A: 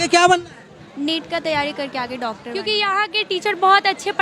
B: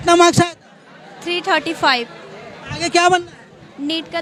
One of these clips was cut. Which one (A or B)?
A